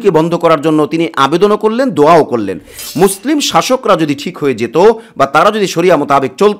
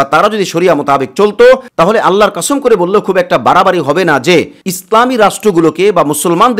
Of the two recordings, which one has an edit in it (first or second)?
first